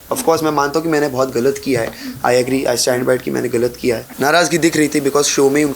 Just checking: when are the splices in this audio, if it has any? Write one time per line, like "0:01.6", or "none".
0:04.1